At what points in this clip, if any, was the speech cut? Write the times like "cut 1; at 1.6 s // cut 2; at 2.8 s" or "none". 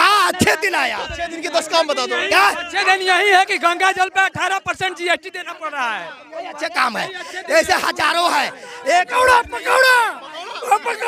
none